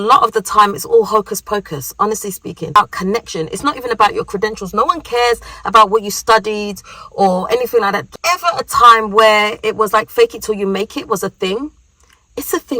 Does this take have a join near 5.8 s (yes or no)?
no